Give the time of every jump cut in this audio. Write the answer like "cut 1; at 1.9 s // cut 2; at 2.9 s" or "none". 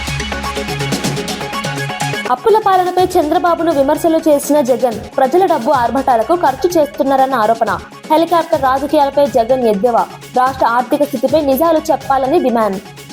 cut 1; at 2.2 s